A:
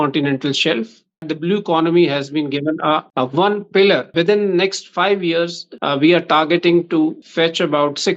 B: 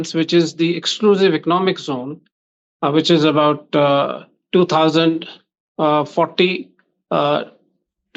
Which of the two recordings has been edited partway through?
A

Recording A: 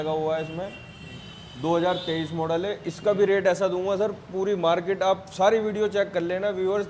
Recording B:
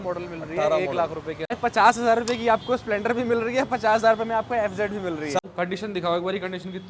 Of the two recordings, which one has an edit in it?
B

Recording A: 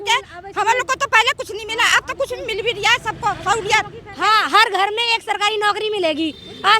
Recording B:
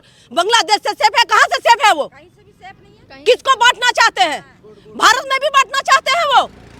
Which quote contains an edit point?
A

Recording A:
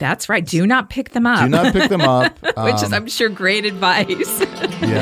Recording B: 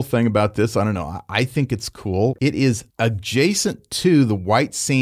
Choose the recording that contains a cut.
B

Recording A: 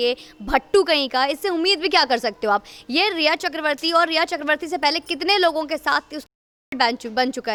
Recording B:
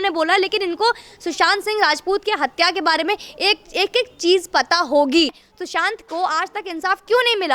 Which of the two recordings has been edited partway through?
B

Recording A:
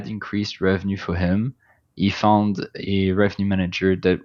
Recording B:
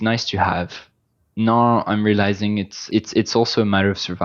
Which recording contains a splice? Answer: B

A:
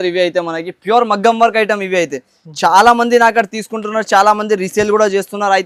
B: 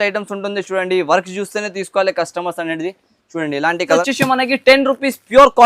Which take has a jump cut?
B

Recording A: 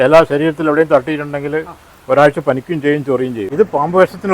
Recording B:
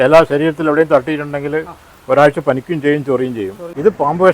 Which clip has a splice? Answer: A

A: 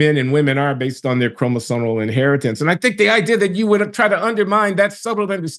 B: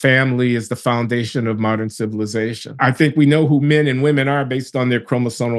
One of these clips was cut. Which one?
B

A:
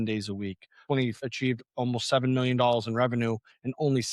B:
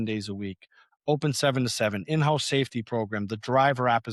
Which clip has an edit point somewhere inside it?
A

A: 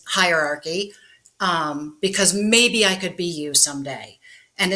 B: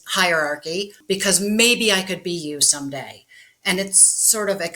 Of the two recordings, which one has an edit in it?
B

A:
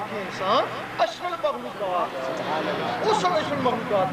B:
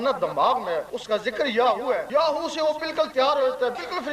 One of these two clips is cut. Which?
B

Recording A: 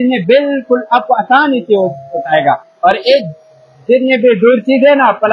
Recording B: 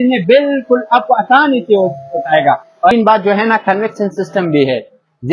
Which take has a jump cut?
B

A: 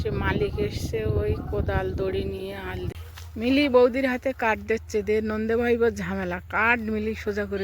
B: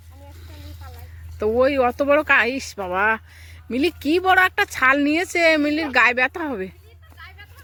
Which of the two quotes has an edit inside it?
A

